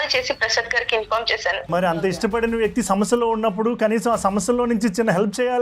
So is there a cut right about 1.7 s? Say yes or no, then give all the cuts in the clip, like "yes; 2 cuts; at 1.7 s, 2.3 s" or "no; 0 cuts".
yes; 1 cut; at 1.7 s